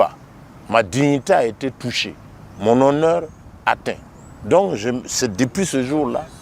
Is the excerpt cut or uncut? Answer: uncut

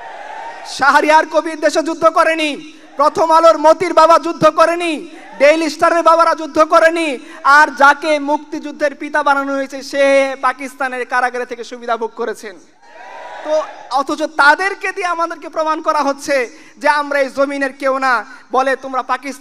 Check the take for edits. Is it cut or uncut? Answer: uncut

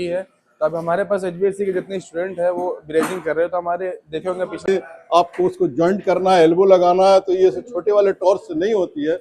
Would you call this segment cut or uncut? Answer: cut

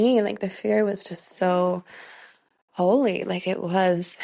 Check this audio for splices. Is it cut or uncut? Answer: uncut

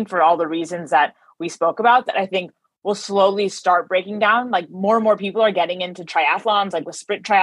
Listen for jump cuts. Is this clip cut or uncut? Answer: uncut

